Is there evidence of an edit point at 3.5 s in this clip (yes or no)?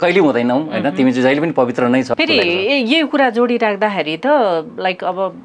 no